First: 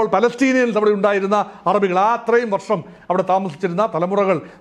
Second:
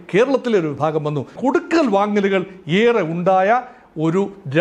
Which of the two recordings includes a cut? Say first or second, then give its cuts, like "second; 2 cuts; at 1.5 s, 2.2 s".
second; 1 cut; at 1.3 s